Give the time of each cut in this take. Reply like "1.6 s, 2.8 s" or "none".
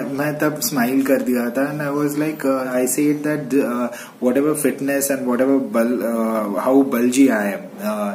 2.7 s